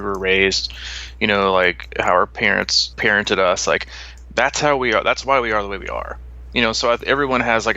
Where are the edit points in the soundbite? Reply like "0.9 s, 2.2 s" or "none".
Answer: 2.8 s